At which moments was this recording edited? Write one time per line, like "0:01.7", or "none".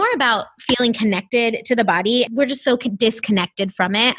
0:02.3